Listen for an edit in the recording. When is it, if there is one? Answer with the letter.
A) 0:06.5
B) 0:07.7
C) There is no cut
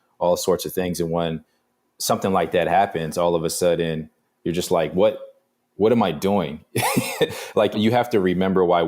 B